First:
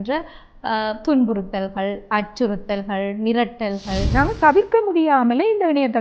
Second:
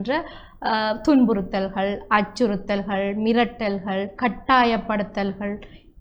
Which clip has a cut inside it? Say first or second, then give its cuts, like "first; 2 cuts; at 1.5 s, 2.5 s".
first; 1 cut; at 4.1 s